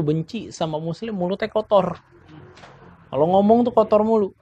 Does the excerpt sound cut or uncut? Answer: uncut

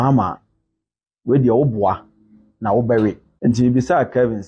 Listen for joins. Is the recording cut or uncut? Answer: cut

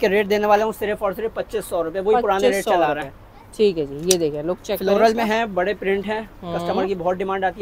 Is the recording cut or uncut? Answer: uncut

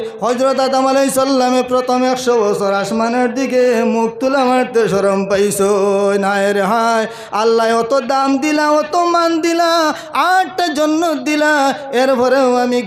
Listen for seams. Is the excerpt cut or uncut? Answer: uncut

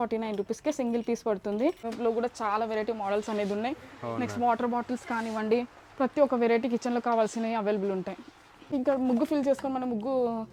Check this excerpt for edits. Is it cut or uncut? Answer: cut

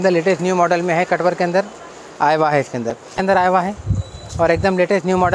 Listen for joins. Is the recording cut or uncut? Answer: cut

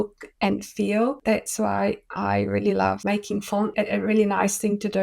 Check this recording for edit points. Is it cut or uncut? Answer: cut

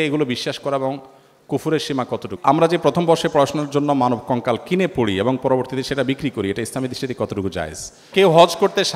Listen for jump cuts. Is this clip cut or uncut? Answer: cut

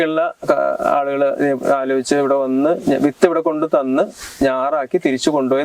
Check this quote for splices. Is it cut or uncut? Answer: uncut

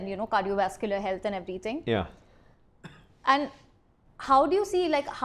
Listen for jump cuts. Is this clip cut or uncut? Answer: uncut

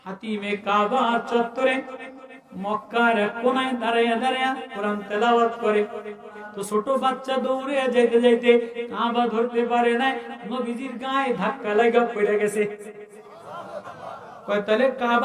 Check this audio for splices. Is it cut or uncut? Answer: cut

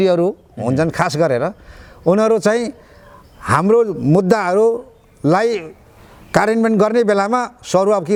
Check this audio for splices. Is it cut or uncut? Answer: uncut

